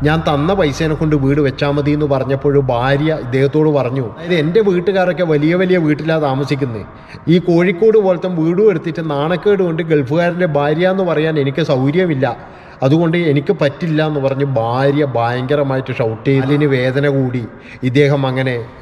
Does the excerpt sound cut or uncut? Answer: cut